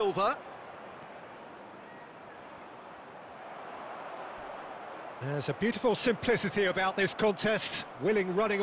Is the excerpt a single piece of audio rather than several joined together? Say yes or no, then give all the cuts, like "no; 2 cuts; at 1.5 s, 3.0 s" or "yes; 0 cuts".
yes; 0 cuts